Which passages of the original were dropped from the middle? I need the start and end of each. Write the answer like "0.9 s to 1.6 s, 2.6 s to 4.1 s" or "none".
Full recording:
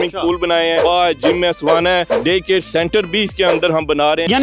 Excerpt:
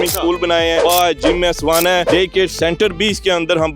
2.1 s to 2.2 s